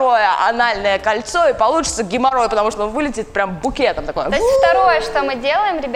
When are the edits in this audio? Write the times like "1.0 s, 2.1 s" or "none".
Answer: none

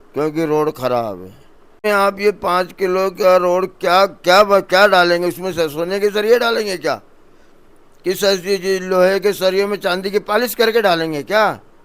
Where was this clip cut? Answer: 1.8 s

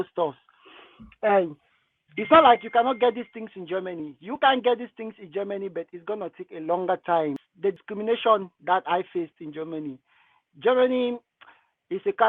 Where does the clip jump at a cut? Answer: 7.4 s

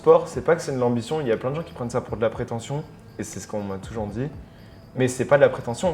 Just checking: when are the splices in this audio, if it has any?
none

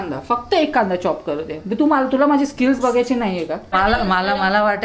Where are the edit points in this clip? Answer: 3.7 s

